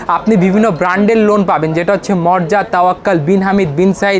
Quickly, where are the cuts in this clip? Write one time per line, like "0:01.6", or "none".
none